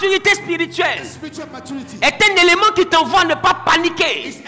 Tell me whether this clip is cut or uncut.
uncut